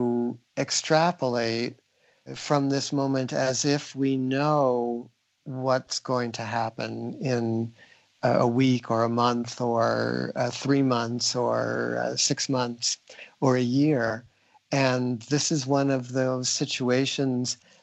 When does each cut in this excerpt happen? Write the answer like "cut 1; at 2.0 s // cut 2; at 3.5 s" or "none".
cut 1; at 2.4 s